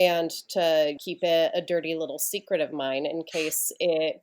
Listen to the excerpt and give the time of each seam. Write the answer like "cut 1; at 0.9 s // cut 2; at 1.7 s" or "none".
cut 1; at 1.0 s